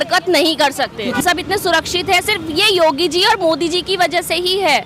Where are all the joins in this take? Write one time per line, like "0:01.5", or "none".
0:01.2